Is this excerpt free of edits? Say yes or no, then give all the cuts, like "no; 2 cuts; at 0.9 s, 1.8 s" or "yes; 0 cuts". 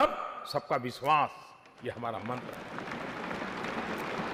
yes; 0 cuts